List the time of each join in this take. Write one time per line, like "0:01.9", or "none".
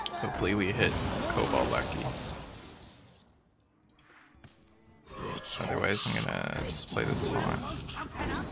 none